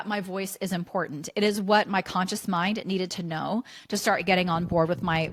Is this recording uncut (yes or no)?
yes